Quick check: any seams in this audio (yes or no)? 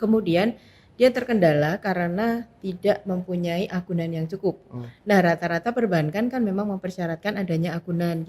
no